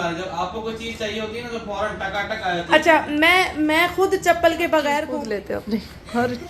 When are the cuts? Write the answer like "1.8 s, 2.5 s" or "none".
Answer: 4.9 s